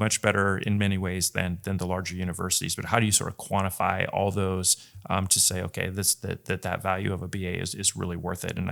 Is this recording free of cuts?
yes; 0 cuts

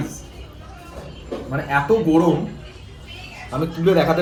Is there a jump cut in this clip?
no; 0 cuts

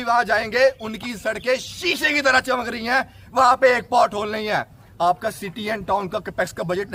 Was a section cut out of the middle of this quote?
no; 0 cuts

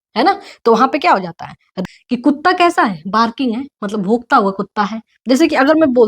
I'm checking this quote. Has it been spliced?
yes; 1 cut; at 1.8 s

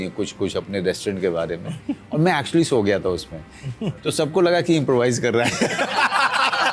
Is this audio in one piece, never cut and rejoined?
yes; 0 cuts

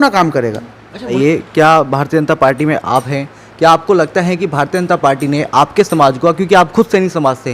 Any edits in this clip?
yes; 1 cut; at 1.1 s

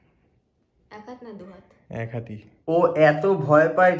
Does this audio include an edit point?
yes; 1 cut; at 2.6 s

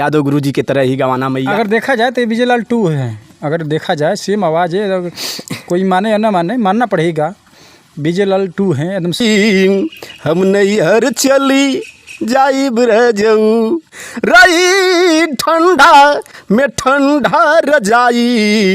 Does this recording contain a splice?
yes; 1 cut; at 9.2 s

